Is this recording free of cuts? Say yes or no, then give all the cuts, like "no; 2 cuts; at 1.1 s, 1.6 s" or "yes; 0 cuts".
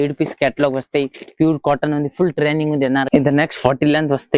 no; 1 cut; at 3.1 s